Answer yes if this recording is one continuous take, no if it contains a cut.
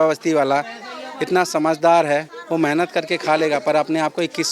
yes